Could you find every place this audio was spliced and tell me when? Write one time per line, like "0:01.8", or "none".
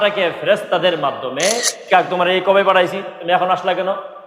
0:01.9